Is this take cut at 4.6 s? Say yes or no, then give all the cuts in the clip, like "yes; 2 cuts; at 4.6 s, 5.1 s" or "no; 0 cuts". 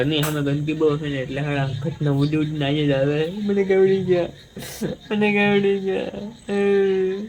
no; 0 cuts